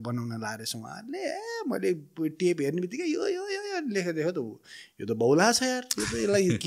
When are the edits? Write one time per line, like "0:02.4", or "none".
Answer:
none